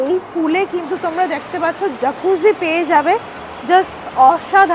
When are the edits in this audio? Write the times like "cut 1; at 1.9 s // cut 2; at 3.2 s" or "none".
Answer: none